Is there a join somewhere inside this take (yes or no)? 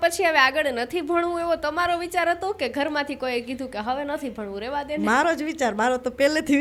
no